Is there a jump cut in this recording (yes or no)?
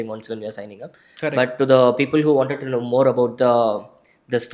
no